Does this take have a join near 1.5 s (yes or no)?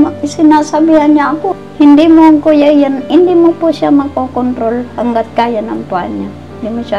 yes